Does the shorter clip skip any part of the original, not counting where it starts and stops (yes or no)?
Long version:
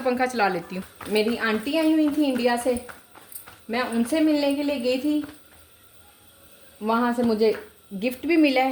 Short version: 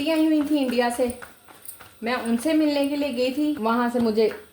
yes